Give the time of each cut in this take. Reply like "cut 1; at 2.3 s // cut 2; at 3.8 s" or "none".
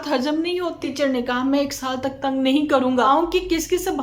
cut 1; at 0.9 s // cut 2; at 3.1 s